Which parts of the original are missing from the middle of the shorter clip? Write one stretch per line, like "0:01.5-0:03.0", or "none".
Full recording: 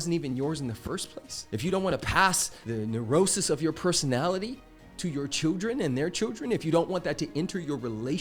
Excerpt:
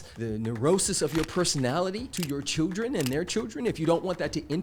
0:04.6-0:04.9